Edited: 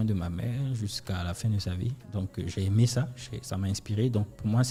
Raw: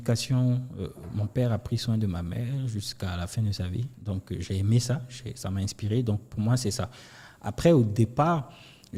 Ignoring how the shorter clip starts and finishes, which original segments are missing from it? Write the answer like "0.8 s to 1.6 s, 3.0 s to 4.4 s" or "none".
none